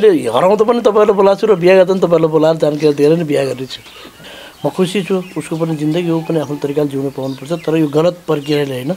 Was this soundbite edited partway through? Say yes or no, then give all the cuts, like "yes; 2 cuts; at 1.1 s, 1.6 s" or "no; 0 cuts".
yes; 1 cut; at 4.3 s